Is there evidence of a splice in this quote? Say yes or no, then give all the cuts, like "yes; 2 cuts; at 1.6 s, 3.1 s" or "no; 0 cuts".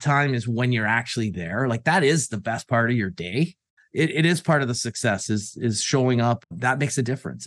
yes; 1 cut; at 6.4 s